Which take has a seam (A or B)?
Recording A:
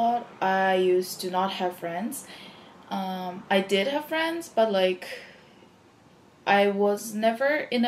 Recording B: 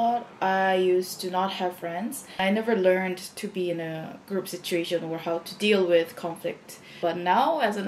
B